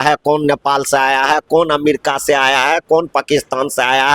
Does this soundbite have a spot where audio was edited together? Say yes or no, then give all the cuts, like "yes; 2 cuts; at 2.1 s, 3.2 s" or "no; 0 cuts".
no; 0 cuts